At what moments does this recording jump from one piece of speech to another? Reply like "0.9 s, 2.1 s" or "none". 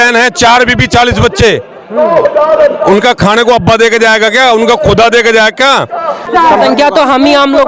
6.2 s